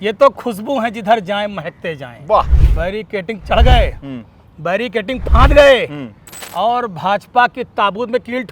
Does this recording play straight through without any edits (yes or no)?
no